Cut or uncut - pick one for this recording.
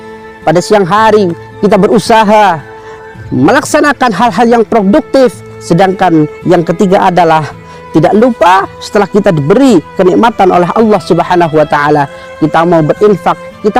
uncut